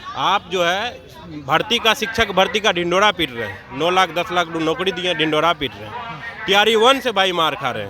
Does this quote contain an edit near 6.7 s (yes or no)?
no